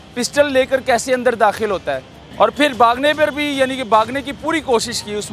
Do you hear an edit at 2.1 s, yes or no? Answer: yes